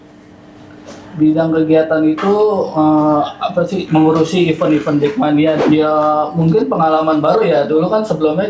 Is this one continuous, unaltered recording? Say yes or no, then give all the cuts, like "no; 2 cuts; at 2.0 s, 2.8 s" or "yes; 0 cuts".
no; 1 cut; at 5.6 s